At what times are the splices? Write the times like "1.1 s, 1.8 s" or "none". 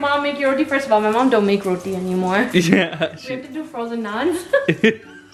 none